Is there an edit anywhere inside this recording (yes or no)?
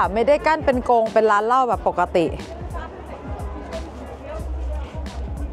no